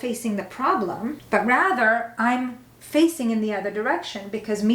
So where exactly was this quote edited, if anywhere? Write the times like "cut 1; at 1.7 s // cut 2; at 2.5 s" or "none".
cut 1; at 1.2 s